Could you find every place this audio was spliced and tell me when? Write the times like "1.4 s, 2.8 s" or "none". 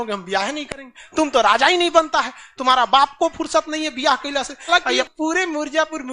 4.7 s